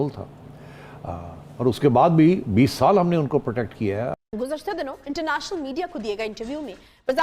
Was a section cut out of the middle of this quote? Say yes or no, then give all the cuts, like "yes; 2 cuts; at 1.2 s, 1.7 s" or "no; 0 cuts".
yes; 1 cut; at 4.1 s